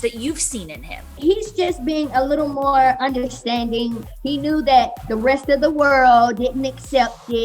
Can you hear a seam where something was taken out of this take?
yes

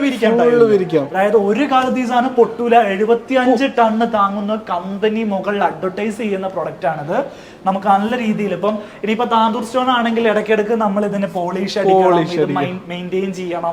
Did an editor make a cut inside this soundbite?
no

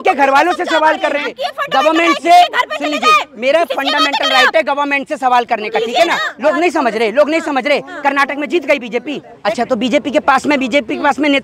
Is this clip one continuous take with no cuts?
no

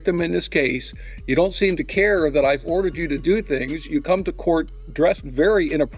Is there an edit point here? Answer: no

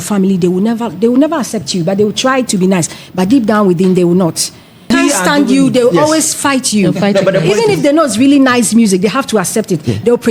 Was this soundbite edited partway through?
yes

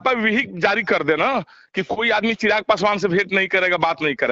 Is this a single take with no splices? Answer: yes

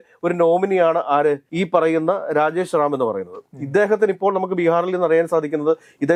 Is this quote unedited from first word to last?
yes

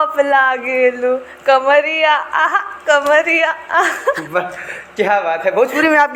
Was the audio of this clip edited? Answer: no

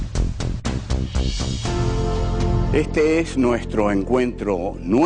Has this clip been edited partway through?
no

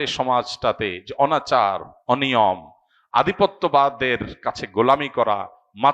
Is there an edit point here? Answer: no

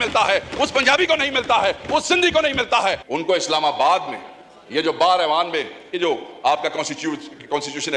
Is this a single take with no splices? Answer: no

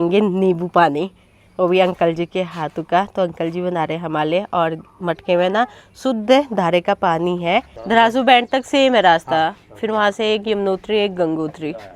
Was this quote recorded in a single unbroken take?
yes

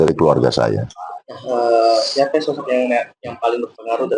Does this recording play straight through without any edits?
yes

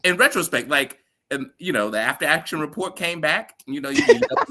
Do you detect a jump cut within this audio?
no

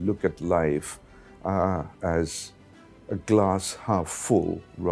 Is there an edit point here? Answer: no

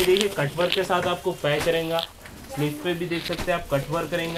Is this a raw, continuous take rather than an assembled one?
yes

